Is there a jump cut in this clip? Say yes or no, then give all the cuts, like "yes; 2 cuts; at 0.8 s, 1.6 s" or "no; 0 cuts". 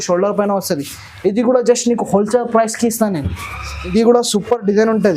yes; 1 cut; at 3.9 s